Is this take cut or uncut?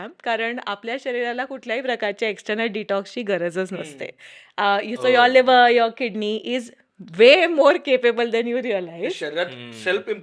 uncut